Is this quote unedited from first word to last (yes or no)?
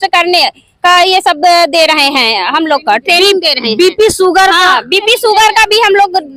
yes